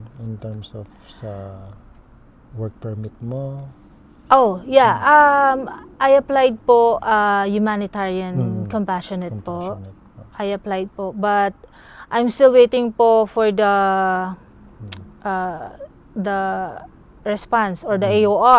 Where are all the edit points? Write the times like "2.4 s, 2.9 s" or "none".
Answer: none